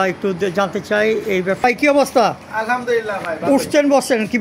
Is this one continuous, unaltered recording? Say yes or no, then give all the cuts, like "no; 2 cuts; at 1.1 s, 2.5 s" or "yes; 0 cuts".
no; 1 cut; at 1.6 s